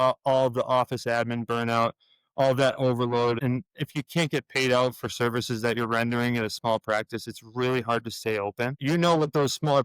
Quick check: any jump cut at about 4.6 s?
no; 2 cuts; at 3.4 s, 8.8 s

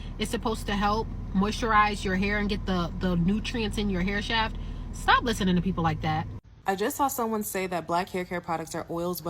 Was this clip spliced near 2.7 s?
no; 1 cut; at 6.5 s

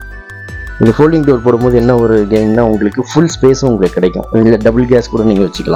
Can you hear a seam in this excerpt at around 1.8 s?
no; 0 cuts

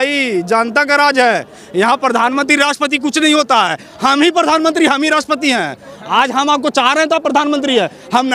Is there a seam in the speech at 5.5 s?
no; 0 cuts

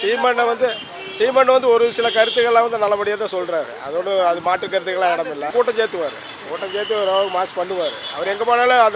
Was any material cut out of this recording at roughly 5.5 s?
yes; 1 cut; at 5.5 s

